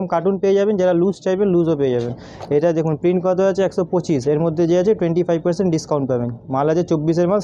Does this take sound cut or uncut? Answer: uncut